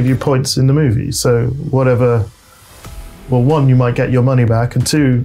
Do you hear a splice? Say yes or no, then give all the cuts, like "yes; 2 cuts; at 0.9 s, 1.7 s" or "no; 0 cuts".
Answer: no; 0 cuts